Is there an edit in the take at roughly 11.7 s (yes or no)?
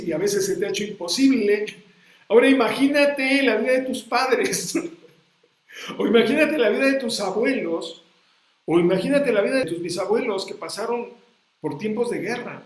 no